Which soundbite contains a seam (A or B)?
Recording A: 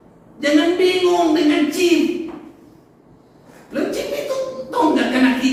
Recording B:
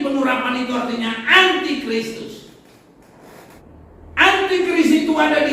B